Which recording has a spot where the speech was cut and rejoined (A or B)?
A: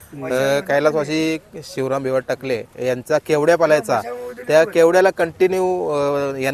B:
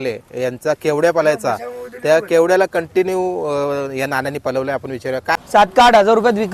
B